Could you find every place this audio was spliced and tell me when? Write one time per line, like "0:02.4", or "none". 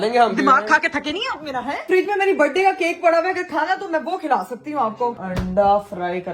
0:01.8
0:05.2